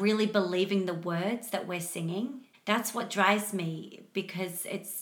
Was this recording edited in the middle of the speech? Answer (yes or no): yes